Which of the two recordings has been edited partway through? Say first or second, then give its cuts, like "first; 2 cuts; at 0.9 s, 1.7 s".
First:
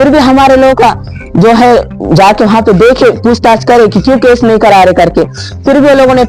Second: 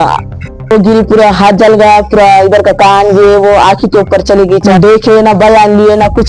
second; 2 cuts; at 0.7 s, 4.7 s